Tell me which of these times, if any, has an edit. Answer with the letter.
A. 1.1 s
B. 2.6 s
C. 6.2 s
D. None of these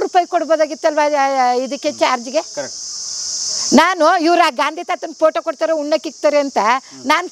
D